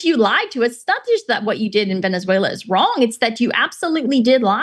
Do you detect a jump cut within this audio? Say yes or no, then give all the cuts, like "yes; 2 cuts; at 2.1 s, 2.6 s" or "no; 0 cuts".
no; 0 cuts